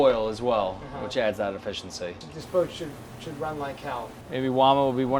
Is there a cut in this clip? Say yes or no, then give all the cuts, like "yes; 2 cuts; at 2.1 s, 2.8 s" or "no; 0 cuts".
yes; 2 cuts; at 2.2 s, 4.2 s